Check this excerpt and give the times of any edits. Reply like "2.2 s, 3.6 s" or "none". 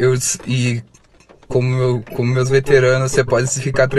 none